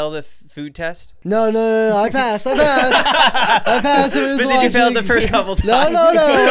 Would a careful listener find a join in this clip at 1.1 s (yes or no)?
yes